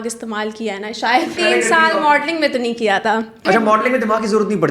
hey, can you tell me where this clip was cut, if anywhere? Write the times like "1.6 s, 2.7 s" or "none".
1.4 s, 3.4 s

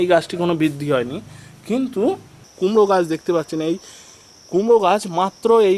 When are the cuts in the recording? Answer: 2.4 s

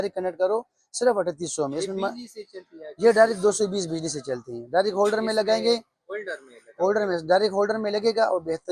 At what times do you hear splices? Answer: none

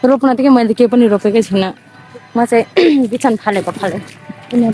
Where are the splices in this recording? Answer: none

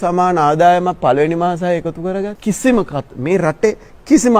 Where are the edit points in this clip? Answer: 2.3 s

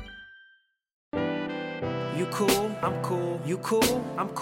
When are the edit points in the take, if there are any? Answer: 1.1 s

